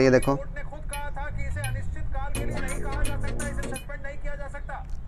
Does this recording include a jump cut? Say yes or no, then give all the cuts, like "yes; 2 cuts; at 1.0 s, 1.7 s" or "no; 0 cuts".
no; 0 cuts